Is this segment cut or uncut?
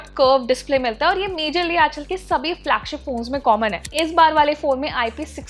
cut